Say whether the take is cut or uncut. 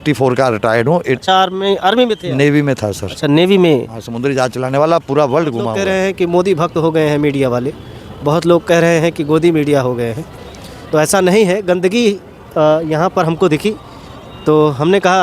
cut